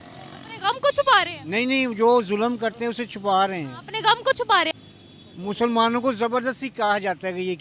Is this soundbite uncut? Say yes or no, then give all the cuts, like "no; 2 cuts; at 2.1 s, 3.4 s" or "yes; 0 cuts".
no; 1 cut; at 4.7 s